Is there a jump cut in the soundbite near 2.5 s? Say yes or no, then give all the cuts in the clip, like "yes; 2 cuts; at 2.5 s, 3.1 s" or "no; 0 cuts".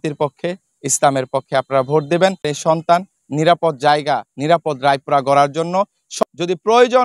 yes; 2 cuts; at 2.5 s, 6.1 s